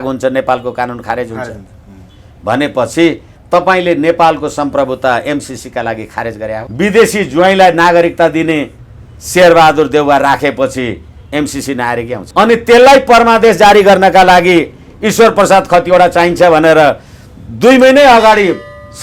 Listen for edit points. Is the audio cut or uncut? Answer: cut